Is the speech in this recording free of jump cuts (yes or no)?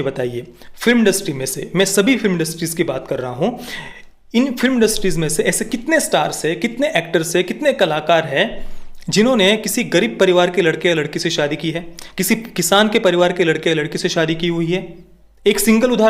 yes